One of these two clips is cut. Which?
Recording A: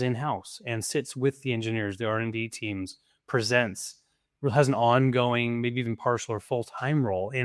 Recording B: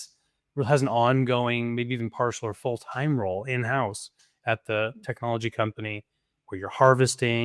B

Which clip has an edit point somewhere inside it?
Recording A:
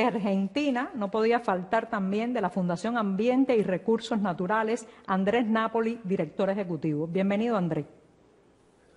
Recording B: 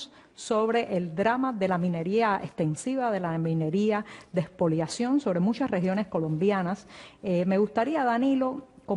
A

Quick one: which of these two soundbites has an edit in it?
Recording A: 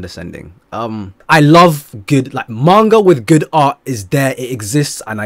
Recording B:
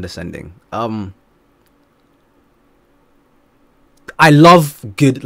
A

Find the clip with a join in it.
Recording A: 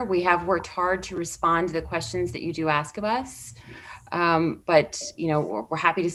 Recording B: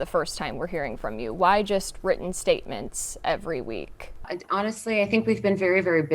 B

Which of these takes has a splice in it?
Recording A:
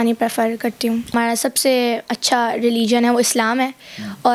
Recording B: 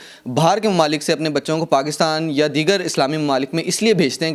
A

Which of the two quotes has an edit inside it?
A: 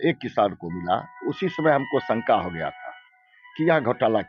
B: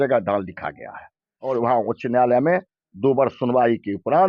B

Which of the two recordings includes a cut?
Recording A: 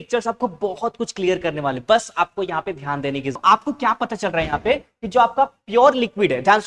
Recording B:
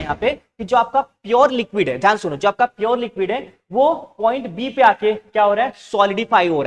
A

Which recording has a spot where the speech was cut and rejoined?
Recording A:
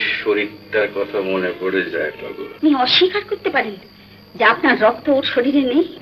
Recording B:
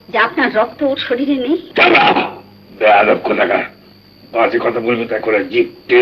A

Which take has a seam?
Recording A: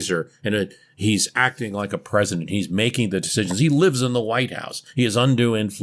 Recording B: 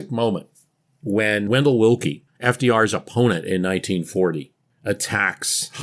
B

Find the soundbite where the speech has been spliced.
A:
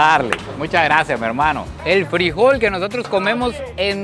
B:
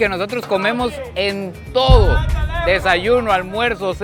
A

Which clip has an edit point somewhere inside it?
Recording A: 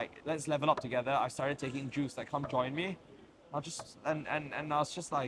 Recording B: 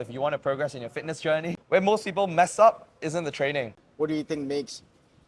B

